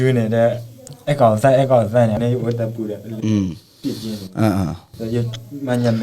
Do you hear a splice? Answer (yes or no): yes